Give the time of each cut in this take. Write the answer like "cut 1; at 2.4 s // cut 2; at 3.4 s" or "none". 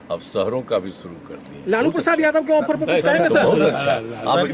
none